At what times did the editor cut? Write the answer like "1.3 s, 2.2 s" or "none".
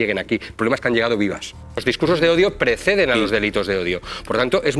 1.8 s